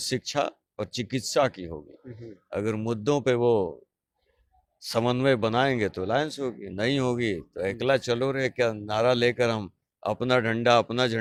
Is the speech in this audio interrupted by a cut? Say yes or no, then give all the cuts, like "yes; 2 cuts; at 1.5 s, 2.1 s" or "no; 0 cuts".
no; 0 cuts